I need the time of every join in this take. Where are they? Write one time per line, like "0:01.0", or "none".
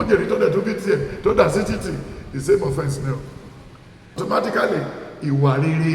0:04.2

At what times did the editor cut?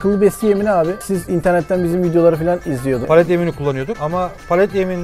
0:01.1
0:03.0
0:03.9

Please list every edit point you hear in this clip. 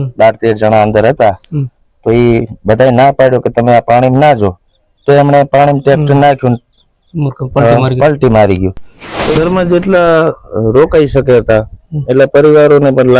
0:09.3

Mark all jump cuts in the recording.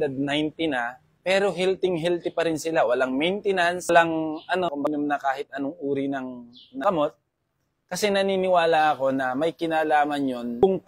0:04.7

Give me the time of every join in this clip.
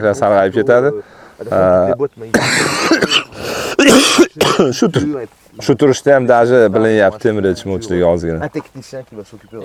none

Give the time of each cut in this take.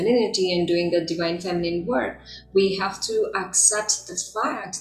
none

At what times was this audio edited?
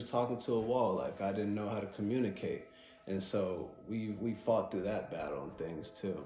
none

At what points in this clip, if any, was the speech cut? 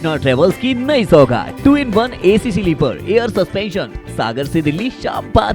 none

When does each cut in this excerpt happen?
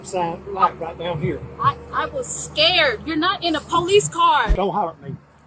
0:04.5

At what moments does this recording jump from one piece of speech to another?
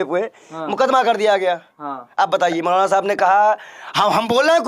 none

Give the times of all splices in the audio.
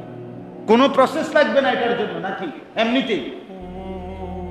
0:03.5

